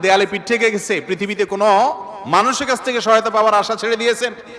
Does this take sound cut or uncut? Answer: uncut